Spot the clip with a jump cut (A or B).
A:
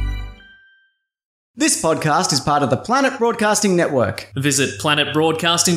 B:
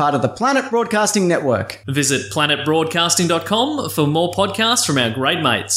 A